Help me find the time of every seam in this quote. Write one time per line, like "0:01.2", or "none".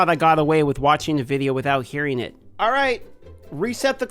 none

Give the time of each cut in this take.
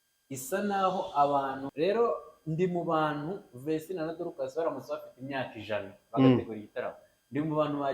0:01.7

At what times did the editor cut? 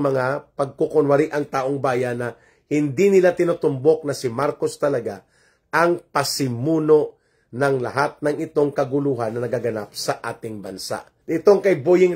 0:11.1

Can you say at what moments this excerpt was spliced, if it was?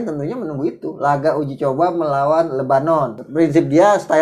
0:03.2

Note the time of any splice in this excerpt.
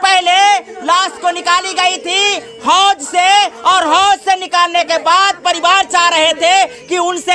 none

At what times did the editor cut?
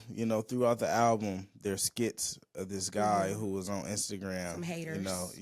none

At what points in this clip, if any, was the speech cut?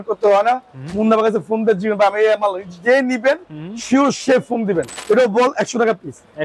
0:04.9

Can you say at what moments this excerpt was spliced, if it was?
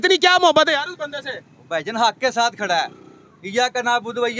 none

